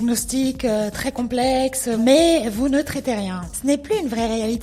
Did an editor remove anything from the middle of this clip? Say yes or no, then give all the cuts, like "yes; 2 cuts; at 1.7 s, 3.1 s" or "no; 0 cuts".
yes; 2 cuts; at 2.0 s, 3.5 s